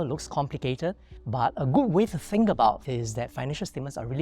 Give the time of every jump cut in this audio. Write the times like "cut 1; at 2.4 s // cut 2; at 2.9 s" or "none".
cut 1; at 1.1 s // cut 2; at 2.8 s